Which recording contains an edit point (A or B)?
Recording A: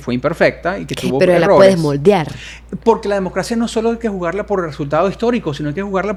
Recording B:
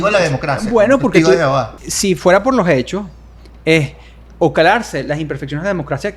B